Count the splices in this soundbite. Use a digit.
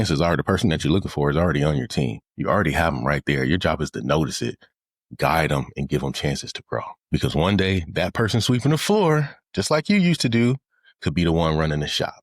2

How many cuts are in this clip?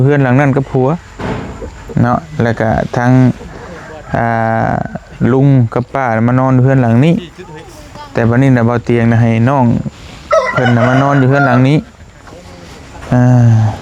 0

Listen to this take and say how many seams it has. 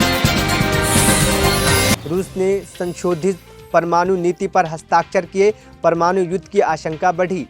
1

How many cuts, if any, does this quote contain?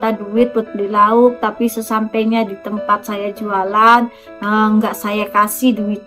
0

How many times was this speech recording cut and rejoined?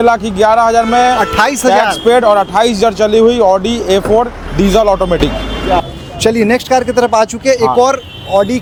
0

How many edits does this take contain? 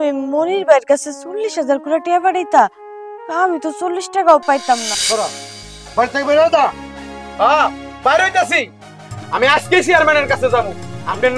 1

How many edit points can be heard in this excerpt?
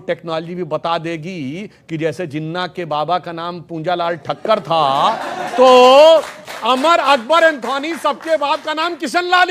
0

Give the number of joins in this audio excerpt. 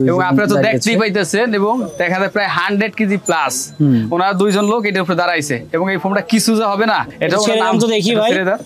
0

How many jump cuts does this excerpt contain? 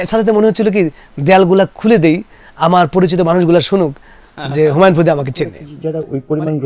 1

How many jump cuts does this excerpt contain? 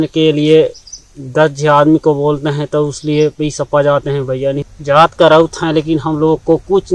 1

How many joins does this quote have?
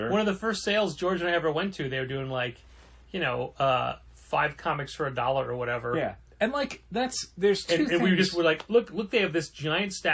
0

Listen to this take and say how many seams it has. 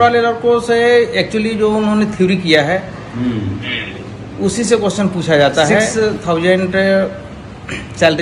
1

